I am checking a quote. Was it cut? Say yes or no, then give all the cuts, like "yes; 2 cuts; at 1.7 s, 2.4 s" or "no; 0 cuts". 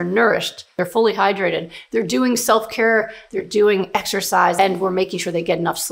yes; 3 cuts; at 0.8 s, 3.2 s, 4.6 s